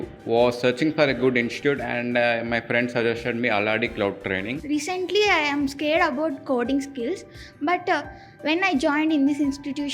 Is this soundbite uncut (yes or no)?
no